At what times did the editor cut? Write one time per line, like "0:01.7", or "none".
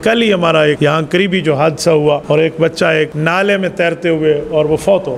0:00.8
0:02.2
0:03.1